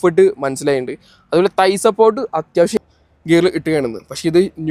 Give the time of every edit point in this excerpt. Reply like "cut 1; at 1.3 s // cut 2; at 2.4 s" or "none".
cut 1; at 2.8 s